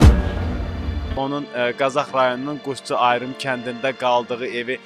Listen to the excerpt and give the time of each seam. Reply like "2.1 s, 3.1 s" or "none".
1.1 s